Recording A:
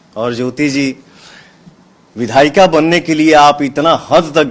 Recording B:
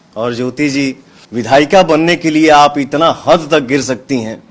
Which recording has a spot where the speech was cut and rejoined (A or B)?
B